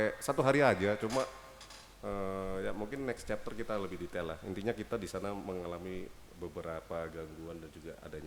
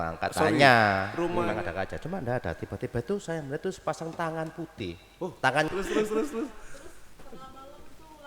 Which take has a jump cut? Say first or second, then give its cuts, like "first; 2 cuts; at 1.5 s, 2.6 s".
second; 2 cuts; at 1.4 s, 5.7 s